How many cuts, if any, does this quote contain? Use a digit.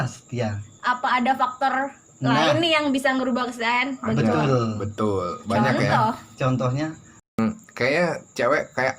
1